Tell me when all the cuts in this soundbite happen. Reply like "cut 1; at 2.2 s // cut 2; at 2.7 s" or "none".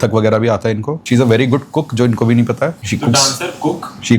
cut 1; at 1.0 s // cut 2; at 2.8 s